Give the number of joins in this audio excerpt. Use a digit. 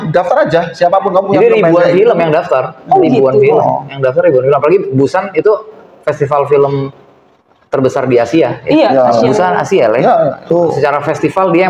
1